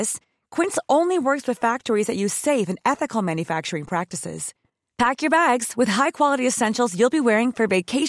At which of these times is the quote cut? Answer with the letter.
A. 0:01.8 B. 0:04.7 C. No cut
C